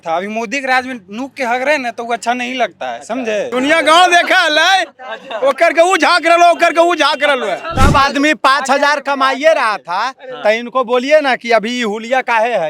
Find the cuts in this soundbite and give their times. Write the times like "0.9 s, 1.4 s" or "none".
3.5 s, 7.7 s